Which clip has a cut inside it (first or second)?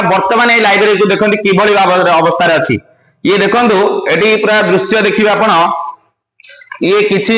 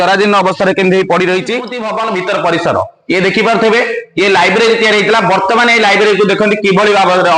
second